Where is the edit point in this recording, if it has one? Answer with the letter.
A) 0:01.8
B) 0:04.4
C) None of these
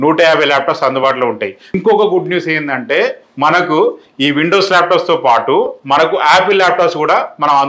A